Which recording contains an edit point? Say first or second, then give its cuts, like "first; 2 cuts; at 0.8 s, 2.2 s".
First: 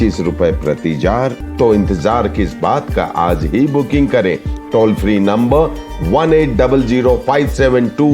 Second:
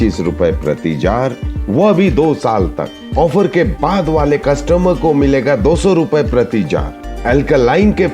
first; 1 cut; at 1.4 s